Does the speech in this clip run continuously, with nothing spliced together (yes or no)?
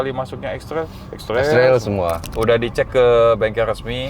no